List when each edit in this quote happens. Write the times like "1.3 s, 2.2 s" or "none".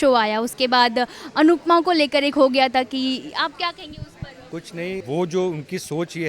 5.0 s